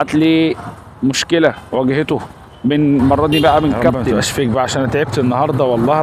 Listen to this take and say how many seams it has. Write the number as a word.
one